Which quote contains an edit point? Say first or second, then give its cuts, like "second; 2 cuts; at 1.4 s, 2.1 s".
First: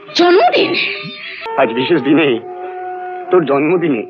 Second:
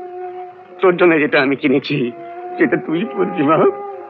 first; 1 cut; at 1.4 s